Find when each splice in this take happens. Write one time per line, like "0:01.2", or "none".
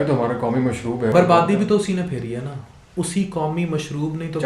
0:01.1